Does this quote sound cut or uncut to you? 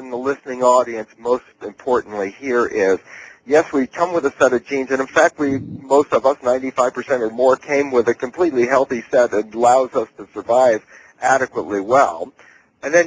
uncut